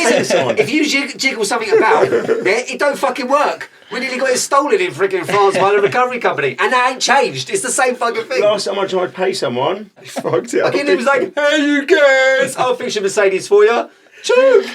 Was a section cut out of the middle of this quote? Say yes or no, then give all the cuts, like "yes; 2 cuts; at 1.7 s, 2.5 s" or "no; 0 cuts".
yes; 1 cut; at 9.9 s